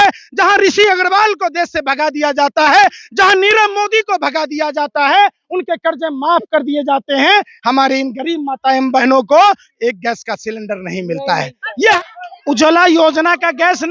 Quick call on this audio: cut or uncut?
cut